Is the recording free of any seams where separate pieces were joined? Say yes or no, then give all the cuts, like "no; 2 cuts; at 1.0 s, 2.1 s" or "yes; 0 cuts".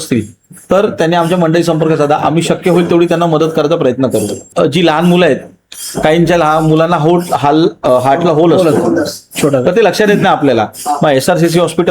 no; 1 cut; at 4.4 s